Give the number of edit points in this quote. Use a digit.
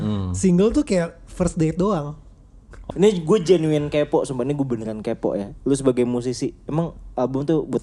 1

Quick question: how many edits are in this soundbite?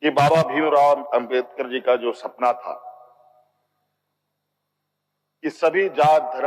1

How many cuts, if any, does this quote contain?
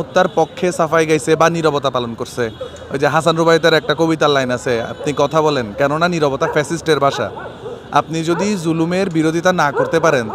0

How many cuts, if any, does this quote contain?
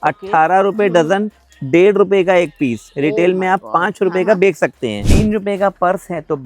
1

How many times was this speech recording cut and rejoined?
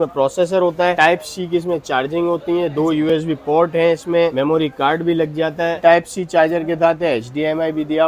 3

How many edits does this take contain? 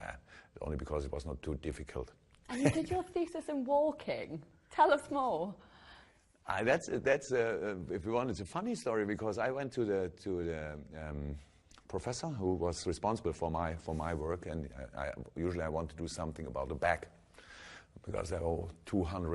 1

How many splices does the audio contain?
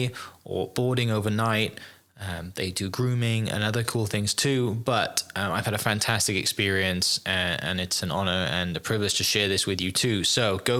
0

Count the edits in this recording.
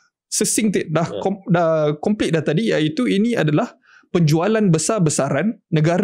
0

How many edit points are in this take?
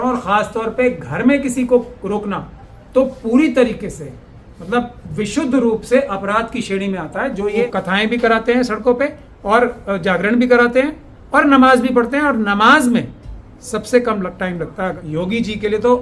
2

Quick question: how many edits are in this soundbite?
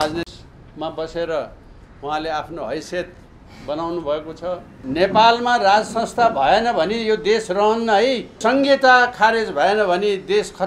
2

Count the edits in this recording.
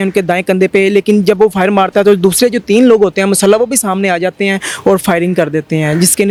0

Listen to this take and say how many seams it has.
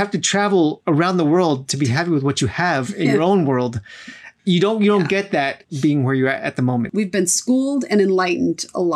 4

